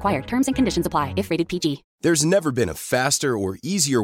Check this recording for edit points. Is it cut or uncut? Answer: cut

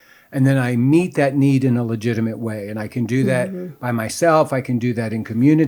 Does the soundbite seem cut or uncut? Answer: uncut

